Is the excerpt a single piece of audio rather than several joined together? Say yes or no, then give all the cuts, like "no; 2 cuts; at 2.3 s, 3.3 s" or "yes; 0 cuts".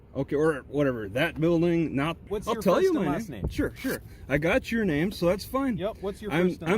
no; 1 cut; at 2.3 s